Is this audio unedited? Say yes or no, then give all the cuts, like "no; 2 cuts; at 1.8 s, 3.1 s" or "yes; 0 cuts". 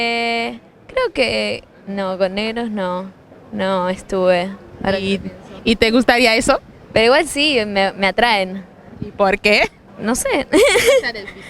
no; 1 cut; at 9.9 s